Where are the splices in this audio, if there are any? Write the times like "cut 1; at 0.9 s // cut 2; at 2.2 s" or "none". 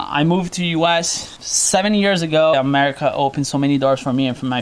cut 1; at 2.5 s